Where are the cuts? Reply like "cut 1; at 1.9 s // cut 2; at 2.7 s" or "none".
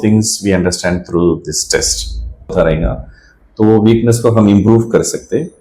cut 1; at 2.5 s